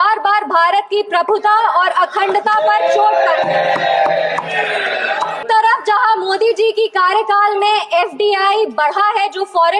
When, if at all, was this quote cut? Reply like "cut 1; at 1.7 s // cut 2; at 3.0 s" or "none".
cut 1; at 5.4 s